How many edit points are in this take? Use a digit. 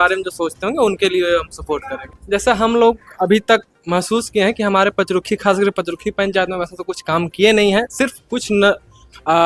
1